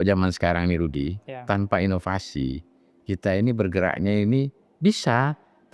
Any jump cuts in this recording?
no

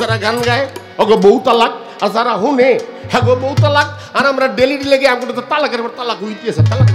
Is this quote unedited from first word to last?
yes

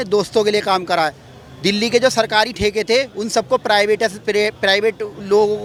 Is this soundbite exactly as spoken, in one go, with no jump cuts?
yes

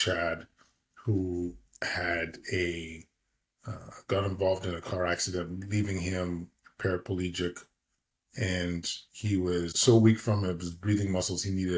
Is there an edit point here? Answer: yes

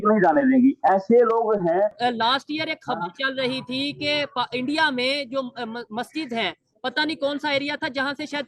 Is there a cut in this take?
yes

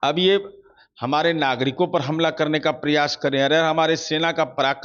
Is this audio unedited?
yes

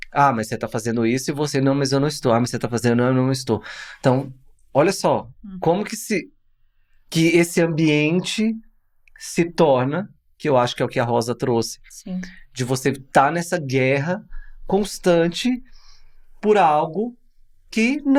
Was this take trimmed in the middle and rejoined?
no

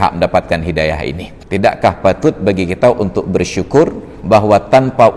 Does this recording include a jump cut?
yes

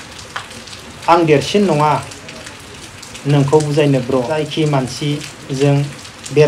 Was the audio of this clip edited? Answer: yes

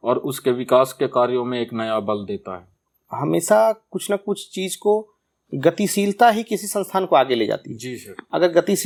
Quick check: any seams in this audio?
no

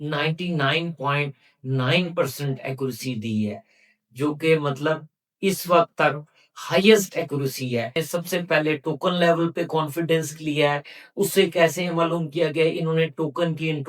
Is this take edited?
yes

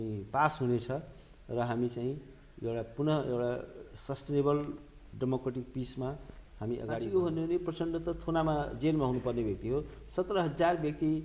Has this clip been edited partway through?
yes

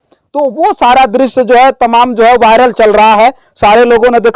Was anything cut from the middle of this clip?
no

